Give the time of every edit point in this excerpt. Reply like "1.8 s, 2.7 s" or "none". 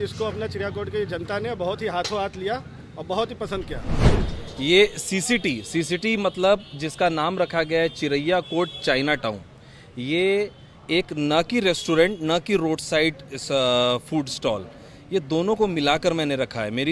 4.1 s